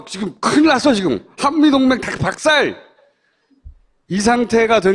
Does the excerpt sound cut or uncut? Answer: cut